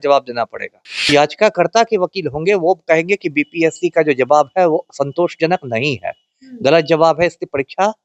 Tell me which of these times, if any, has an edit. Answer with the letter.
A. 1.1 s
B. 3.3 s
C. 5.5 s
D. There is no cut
A